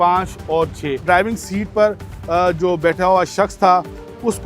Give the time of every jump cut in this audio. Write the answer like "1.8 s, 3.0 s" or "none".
1.0 s